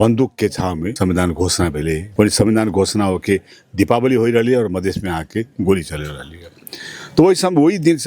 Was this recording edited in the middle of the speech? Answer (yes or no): yes